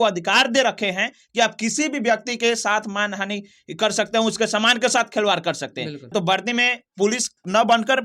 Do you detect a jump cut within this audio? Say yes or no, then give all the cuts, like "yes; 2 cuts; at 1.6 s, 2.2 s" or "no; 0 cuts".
yes; 1 cut; at 6.1 s